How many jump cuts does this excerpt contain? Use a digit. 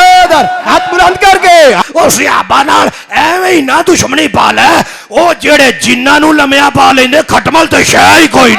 1